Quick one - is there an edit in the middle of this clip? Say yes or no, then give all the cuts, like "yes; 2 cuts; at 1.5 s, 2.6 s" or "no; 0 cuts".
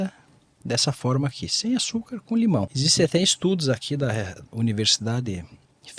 yes; 1 cut; at 2.5 s